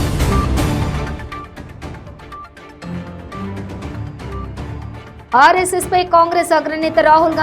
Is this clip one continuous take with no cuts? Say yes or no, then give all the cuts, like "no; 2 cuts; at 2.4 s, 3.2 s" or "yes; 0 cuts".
yes; 0 cuts